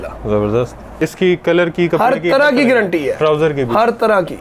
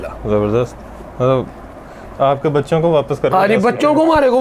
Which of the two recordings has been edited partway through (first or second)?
first